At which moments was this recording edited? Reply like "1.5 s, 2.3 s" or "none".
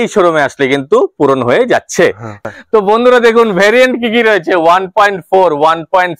2.4 s

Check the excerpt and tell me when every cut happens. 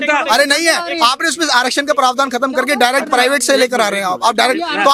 none

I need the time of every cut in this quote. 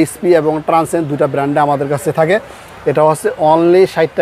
none

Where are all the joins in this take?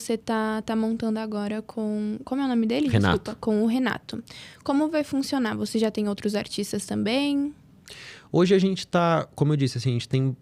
none

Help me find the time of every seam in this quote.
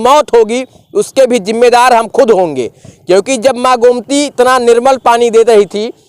none

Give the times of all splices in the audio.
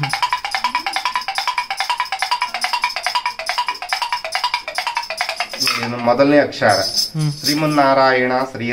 none

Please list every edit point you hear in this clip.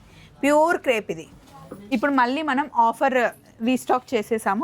1.7 s

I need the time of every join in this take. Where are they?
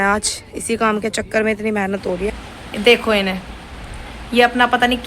2.4 s

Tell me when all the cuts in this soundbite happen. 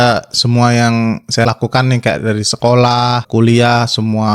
1.5 s, 3.3 s

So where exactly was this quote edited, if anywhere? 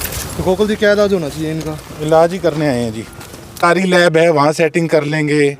3.6 s

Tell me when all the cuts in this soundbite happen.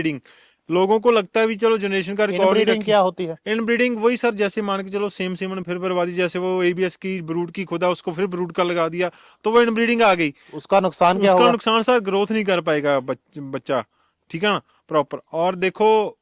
none

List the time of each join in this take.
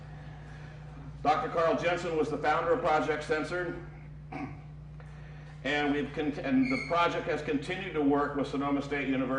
6.5 s

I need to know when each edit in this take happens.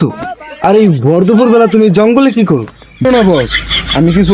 3.0 s

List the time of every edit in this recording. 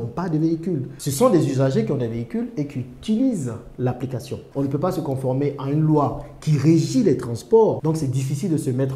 4.5 s, 7.8 s

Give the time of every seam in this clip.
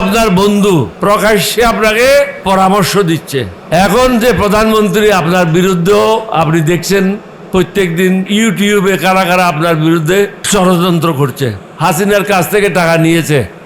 0.9 s, 2.4 s, 3.6 s, 8.3 s, 10.4 s, 11.6 s

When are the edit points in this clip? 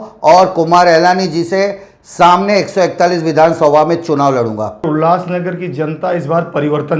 4.8 s

